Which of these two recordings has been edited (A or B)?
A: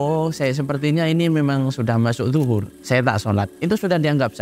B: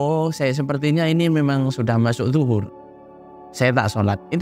A